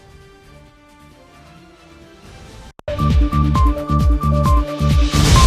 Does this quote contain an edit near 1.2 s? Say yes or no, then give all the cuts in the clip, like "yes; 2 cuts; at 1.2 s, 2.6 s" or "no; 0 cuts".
no; 1 cut; at 2.7 s